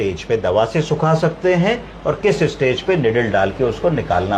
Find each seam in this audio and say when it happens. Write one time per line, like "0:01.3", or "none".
none